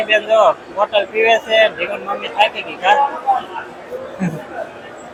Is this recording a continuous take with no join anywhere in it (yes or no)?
yes